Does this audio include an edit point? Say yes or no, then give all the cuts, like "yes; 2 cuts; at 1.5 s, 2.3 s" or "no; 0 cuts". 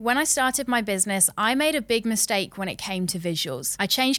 no; 0 cuts